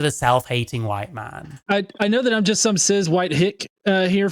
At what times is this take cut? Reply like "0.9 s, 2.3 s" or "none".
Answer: 1.6 s

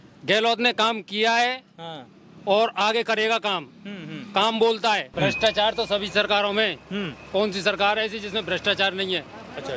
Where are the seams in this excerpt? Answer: 5.1 s

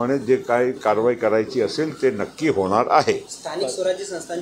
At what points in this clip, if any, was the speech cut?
3.3 s

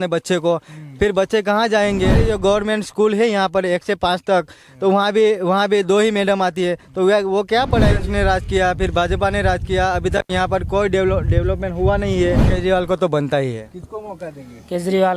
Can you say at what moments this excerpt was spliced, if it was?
2.3 s, 7.9 s, 12.5 s

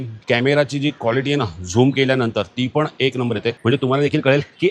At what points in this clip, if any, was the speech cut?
3.5 s

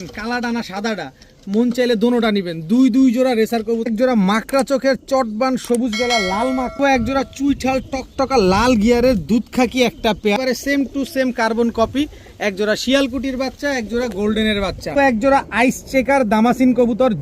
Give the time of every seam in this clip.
3.9 s, 6.8 s, 10.4 s, 14.9 s

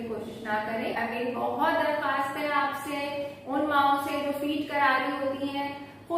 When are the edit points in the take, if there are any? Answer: 1.0 s

